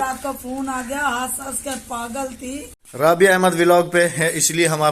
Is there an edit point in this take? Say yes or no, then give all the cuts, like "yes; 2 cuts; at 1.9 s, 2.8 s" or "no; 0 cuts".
yes; 1 cut; at 2.8 s